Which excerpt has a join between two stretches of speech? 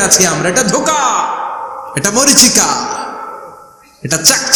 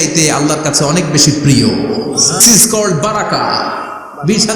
second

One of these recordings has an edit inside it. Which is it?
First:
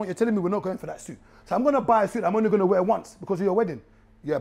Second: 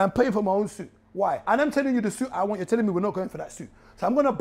second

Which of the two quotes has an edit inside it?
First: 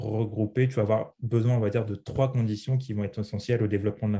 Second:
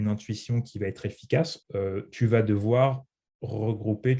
second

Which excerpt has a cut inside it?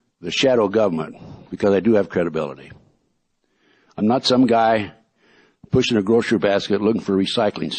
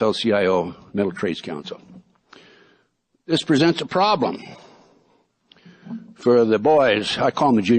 second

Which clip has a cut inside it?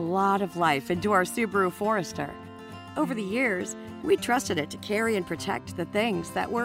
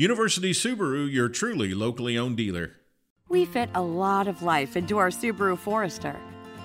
second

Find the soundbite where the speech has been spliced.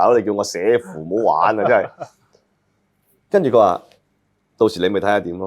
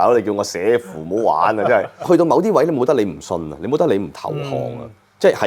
second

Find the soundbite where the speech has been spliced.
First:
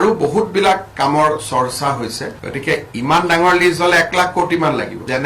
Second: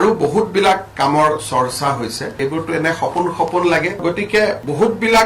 second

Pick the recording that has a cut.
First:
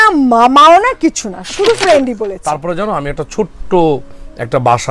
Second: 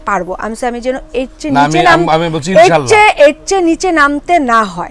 first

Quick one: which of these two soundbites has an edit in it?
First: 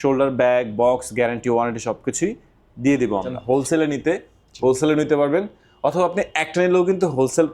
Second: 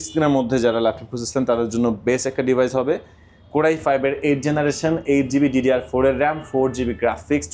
first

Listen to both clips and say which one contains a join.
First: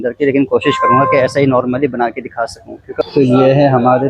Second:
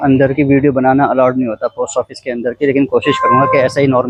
first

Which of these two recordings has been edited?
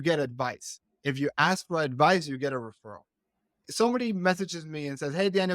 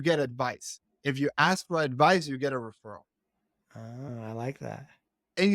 first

